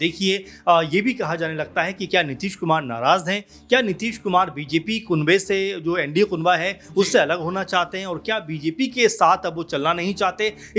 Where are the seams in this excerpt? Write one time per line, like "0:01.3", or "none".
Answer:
none